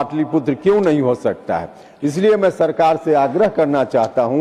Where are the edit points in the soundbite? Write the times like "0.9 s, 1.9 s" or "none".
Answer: none